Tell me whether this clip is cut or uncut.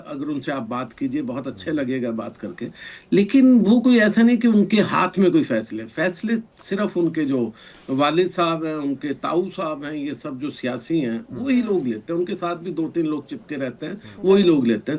uncut